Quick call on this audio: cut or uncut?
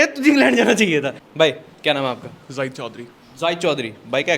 cut